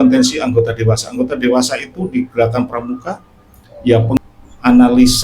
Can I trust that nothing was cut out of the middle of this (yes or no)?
no